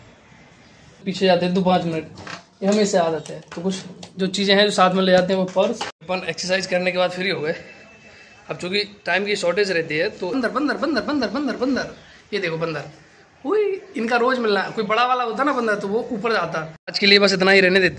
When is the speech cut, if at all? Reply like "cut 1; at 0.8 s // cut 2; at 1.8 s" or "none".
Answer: cut 1; at 1.1 s // cut 2; at 5.9 s // cut 3; at 10.3 s // cut 4; at 16.8 s